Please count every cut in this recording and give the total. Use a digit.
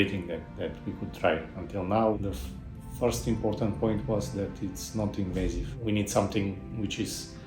2